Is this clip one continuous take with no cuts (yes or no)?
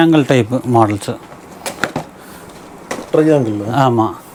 yes